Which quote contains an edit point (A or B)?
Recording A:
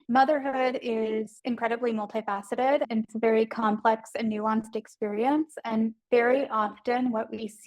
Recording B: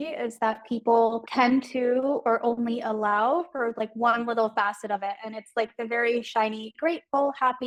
A